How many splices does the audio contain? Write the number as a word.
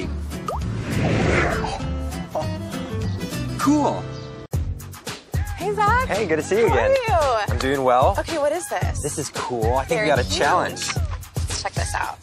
zero